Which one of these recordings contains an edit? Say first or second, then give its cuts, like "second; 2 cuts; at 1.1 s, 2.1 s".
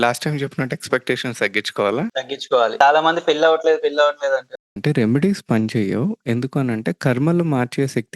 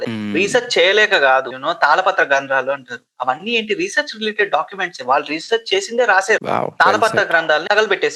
first; 1 cut; at 4.6 s